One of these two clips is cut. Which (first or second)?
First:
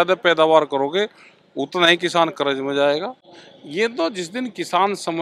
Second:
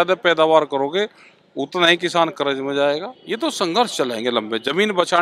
second